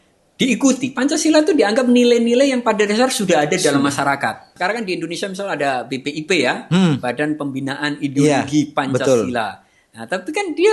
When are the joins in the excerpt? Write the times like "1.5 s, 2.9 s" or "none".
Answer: 4.4 s